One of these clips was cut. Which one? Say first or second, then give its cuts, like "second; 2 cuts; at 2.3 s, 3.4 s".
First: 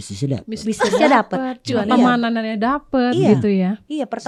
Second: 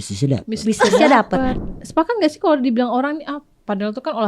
second; 1 cut; at 1.6 s